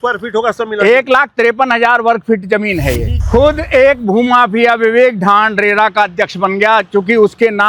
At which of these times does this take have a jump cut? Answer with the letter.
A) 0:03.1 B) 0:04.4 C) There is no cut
A